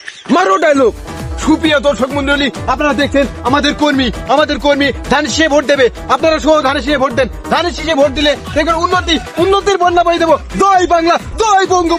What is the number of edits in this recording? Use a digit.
0